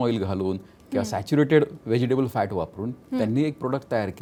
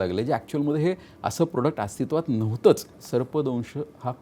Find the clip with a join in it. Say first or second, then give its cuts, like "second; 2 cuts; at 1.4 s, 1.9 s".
second; 1 cut; at 3.0 s